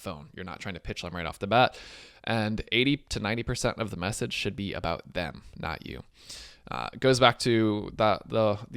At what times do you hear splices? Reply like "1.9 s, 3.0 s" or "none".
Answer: none